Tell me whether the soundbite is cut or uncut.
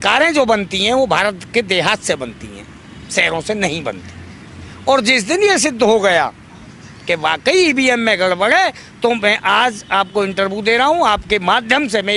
uncut